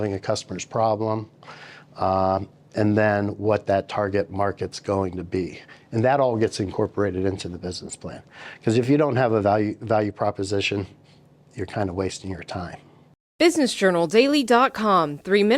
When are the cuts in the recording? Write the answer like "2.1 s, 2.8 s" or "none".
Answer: 13.1 s